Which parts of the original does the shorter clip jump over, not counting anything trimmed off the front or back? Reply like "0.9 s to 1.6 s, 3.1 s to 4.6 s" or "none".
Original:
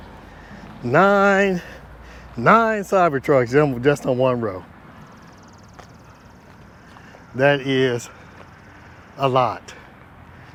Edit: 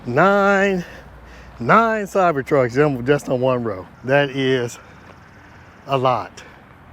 4.7 s to 7.2 s